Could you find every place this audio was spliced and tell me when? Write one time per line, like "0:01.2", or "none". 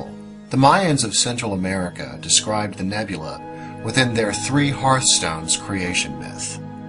none